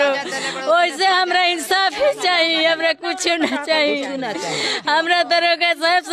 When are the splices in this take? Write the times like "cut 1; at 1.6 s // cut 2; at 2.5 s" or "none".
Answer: none